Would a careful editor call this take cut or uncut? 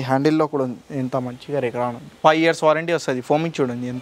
cut